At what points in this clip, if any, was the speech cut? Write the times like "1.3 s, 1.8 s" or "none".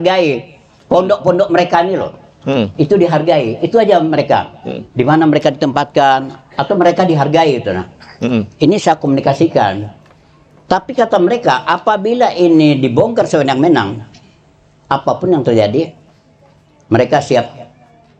none

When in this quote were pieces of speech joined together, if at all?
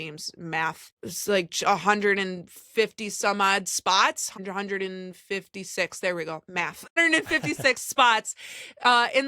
0.9 s, 4.4 s, 6.9 s

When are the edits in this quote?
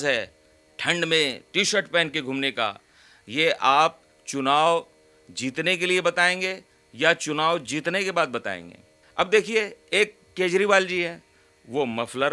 9.0 s

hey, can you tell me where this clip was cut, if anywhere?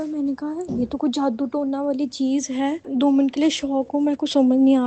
none

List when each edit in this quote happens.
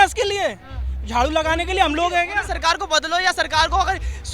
2.5 s

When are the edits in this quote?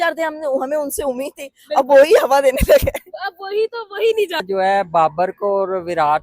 4.4 s

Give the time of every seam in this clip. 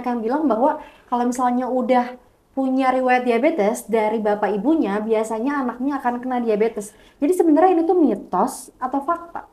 none

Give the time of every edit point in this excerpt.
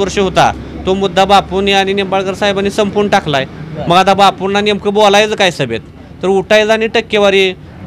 none

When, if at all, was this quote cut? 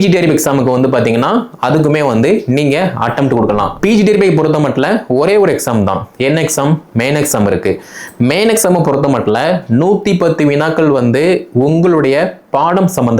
3.7 s

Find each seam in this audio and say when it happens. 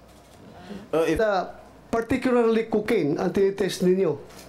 1.2 s

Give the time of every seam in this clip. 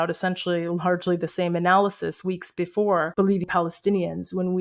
3.2 s

